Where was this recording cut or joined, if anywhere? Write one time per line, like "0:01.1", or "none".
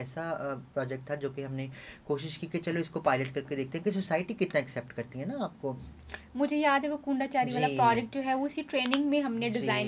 none

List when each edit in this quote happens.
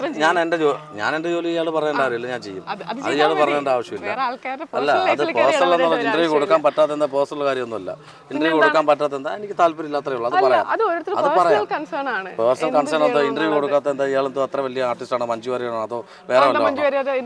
none

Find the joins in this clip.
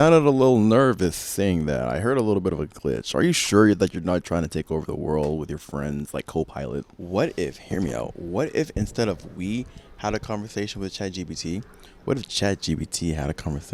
0:07.0

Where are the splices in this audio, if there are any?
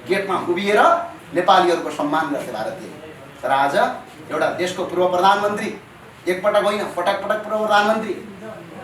none

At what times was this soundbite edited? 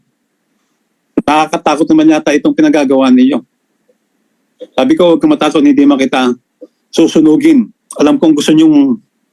0:07.8

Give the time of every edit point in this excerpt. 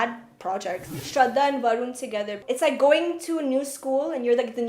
0:00.9
0:02.5

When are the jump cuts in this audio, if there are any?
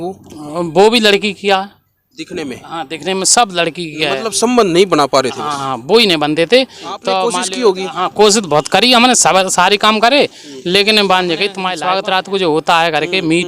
0:07.3
0:11.7

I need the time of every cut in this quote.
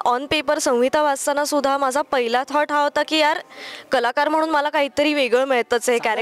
none

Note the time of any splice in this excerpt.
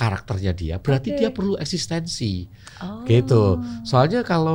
none

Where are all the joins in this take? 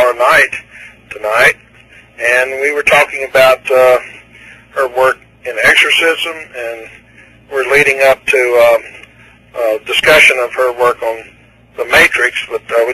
0:07.9

